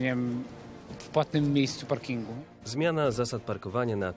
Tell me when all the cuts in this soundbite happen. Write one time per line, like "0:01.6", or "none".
0:02.2